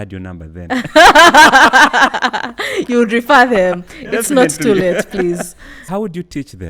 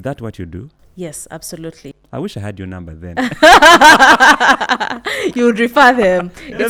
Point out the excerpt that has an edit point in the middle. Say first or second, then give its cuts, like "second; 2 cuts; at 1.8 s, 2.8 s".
first; 1 cut; at 5.8 s